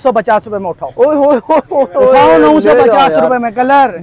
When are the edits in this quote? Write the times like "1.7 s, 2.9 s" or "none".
none